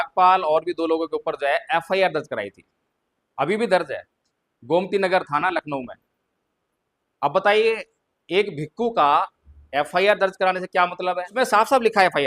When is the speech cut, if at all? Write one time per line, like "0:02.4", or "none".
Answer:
0:11.3